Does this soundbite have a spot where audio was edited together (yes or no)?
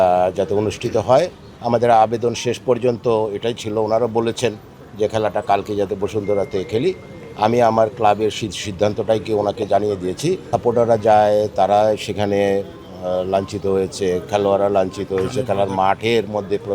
yes